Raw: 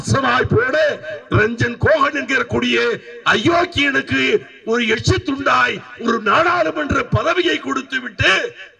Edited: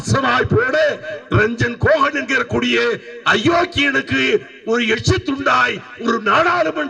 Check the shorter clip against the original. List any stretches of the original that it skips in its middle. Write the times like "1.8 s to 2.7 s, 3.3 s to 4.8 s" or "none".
none